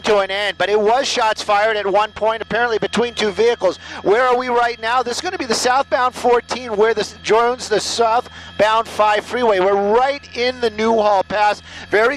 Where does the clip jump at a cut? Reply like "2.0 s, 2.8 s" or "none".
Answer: none